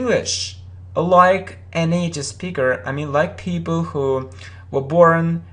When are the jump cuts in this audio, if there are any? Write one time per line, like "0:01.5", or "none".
0:03.3